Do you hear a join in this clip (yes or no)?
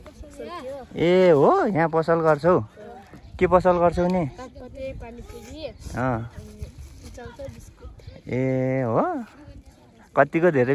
no